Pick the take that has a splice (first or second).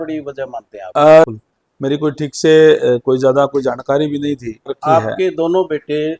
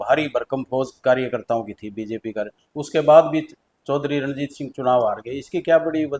first